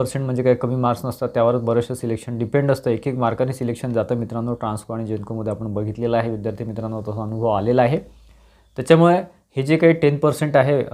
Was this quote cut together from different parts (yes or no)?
no